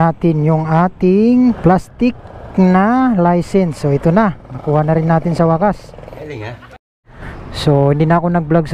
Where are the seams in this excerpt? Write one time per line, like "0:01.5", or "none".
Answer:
none